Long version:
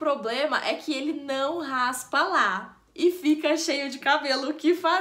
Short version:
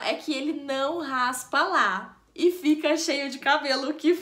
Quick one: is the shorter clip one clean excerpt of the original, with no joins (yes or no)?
yes